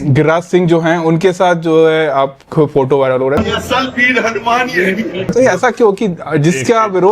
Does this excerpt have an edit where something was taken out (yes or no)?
yes